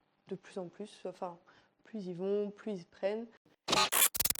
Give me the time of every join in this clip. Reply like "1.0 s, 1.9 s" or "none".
3.4 s